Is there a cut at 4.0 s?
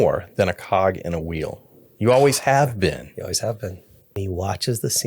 yes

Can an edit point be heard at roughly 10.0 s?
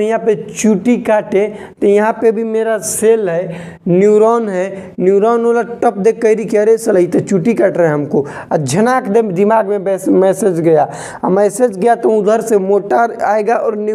no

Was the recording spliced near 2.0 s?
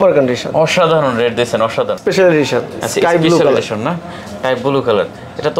yes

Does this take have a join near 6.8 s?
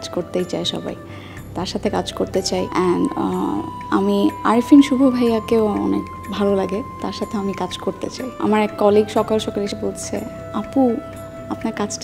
no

